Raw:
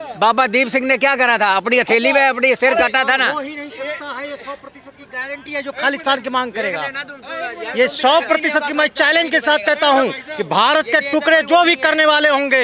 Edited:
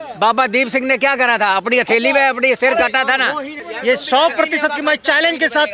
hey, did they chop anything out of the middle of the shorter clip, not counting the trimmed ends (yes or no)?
yes